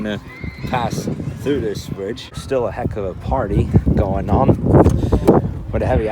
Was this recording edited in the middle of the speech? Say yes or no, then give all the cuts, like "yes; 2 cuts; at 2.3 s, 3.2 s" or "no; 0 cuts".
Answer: yes; 1 cut; at 2.4 s